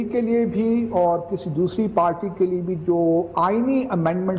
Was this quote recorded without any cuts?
yes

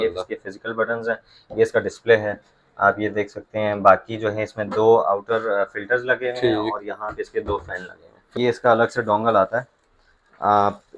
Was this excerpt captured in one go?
no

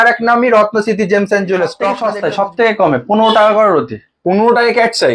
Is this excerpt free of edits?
no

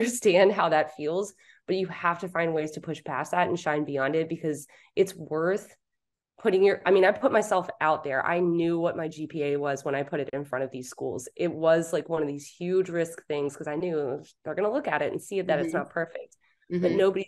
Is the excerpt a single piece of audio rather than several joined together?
yes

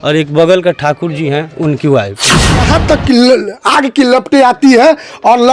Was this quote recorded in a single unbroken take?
no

